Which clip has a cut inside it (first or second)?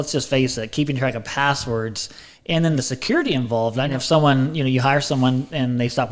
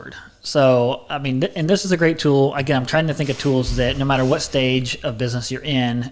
first